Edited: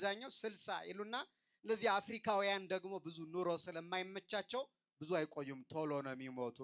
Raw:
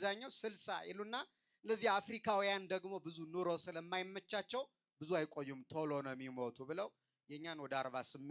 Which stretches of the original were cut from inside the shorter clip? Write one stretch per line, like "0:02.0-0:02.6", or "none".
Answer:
none